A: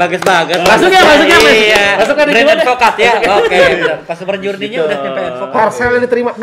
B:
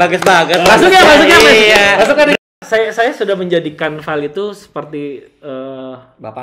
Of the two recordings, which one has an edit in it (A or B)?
B